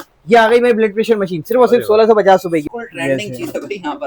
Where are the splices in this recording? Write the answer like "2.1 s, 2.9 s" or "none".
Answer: 2.7 s